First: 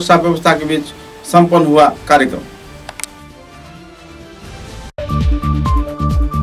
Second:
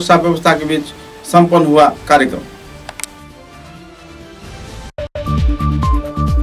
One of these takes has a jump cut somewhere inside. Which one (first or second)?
second